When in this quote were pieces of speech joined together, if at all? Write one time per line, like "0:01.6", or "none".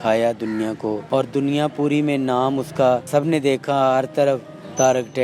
0:01.0
0:03.1